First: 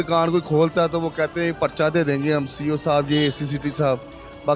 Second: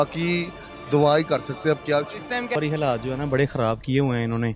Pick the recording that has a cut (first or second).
second